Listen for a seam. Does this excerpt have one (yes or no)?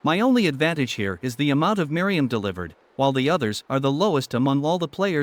no